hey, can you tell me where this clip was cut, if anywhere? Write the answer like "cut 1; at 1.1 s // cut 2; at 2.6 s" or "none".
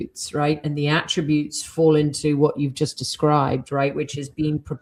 none